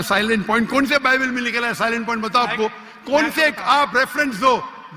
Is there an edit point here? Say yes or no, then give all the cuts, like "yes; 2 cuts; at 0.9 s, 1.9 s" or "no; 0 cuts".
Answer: no; 0 cuts